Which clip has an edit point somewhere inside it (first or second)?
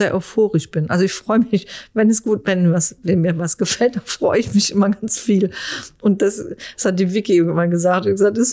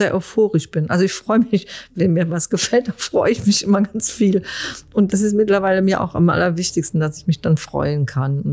second